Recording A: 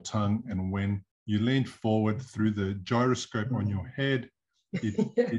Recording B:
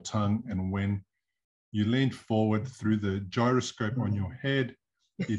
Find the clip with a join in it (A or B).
A